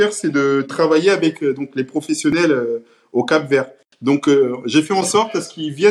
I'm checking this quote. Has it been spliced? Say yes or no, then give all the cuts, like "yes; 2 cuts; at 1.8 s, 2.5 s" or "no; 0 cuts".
no; 0 cuts